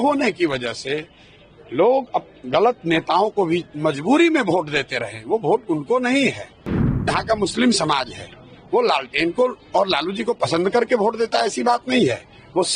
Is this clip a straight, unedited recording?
yes; 0 cuts

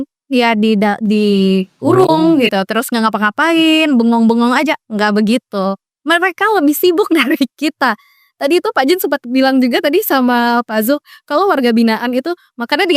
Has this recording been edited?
no; 0 cuts

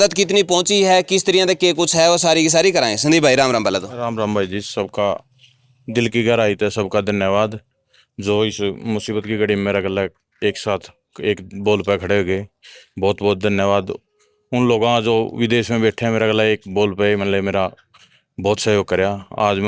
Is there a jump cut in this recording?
no; 0 cuts

